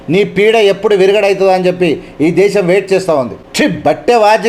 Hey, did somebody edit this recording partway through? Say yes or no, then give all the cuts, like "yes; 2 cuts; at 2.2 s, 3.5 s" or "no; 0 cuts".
yes; 1 cut; at 3.4 s